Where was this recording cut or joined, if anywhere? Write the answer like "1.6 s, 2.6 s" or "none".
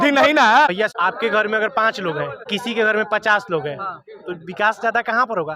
0.9 s